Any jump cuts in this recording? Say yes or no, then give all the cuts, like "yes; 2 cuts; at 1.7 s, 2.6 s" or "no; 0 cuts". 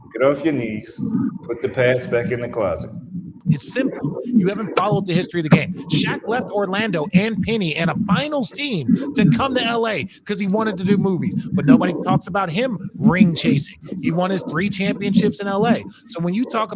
yes; 1 cut; at 3.4 s